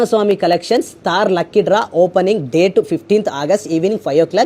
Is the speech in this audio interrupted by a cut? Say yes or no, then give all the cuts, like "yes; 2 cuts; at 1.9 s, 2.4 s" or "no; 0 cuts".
no; 0 cuts